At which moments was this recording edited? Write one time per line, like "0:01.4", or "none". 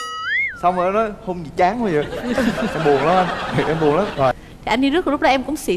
0:04.4